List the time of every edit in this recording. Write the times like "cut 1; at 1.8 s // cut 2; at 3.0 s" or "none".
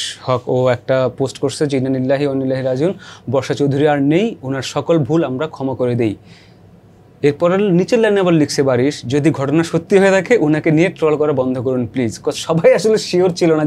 none